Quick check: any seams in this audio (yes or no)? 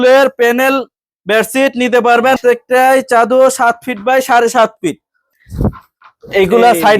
yes